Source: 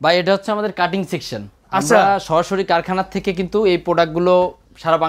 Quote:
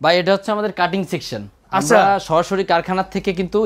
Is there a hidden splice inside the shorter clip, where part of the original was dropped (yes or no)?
no